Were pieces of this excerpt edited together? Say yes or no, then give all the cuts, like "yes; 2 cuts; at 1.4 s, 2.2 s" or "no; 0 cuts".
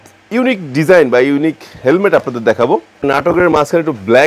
yes; 1 cut; at 3.0 s